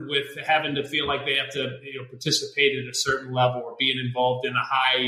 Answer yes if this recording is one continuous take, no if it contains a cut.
yes